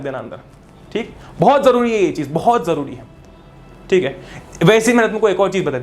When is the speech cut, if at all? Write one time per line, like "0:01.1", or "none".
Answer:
none